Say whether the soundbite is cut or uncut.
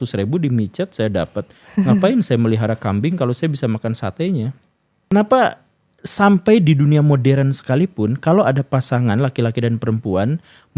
cut